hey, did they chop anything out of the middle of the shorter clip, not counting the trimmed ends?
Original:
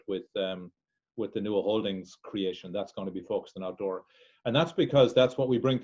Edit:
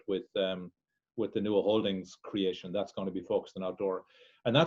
no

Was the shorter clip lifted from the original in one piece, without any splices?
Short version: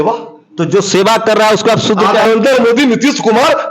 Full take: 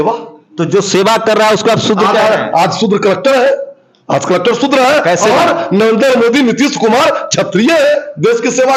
no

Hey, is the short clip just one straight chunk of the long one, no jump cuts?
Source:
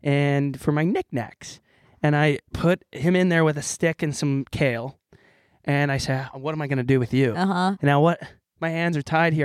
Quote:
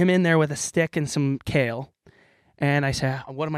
yes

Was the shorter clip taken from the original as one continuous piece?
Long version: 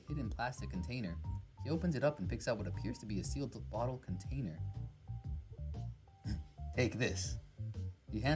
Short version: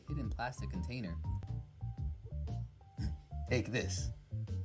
no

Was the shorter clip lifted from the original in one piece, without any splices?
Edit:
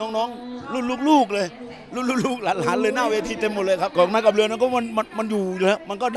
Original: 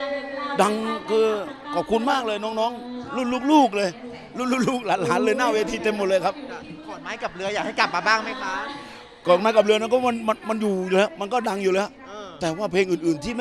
no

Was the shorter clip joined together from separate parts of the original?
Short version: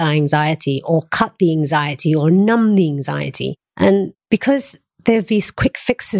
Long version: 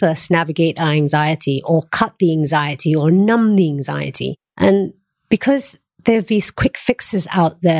yes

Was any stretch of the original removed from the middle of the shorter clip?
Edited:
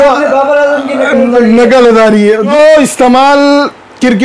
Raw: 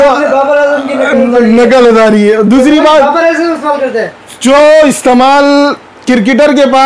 yes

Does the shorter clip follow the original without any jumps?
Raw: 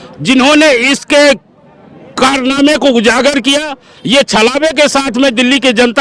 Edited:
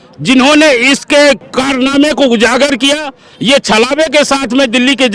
no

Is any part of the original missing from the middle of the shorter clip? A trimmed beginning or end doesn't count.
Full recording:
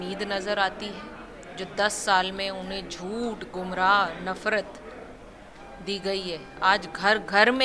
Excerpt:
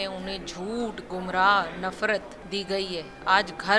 yes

